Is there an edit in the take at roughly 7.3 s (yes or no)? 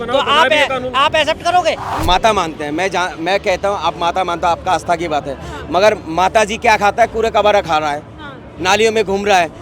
no